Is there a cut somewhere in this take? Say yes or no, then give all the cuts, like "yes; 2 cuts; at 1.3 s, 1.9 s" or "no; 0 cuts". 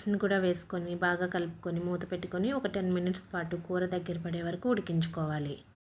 no; 0 cuts